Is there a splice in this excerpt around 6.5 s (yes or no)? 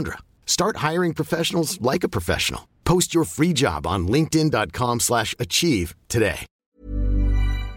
yes